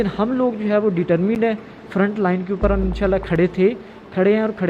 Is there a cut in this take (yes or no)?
no